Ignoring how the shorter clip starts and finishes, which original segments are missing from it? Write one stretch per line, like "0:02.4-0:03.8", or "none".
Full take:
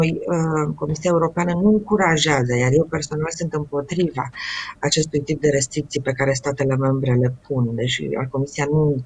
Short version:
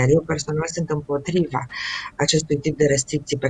none

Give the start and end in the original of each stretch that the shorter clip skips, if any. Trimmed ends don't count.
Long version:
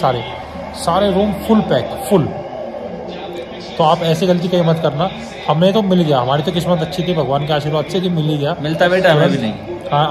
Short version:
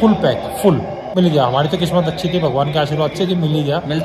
0:02.6-0:05.9

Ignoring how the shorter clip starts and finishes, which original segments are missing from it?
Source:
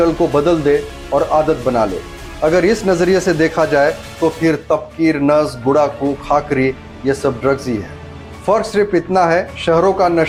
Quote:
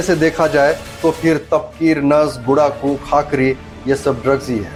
none

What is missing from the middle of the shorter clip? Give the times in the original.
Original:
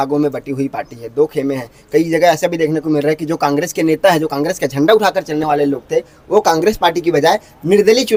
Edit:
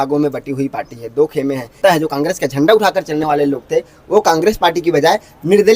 0:01.8-0:04.0

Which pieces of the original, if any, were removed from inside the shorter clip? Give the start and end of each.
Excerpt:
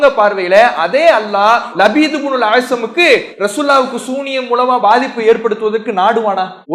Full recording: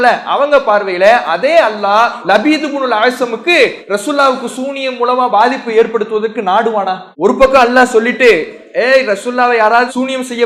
none

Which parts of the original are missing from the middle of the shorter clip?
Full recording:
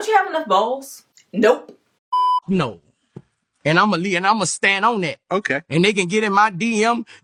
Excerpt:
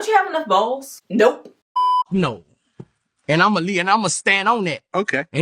0:00.9-0:01.2
0:01.8-0:01.9

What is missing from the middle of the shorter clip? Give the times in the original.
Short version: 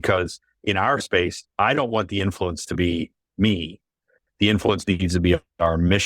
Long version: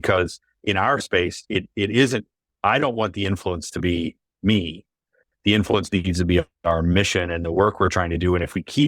0:01.4-0:02.4

